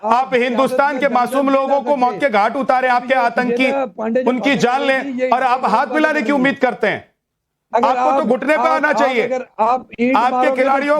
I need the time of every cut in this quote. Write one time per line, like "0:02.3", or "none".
0:01.3

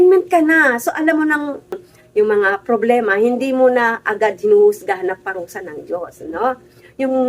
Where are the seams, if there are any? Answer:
0:01.9

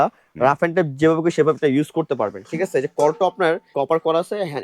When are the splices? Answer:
0:03.7

